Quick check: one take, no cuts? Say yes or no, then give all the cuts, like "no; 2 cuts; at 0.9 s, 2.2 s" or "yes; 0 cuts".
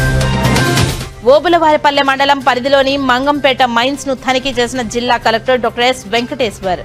yes; 0 cuts